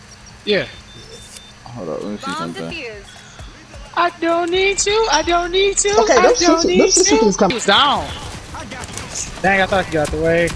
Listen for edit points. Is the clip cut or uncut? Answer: cut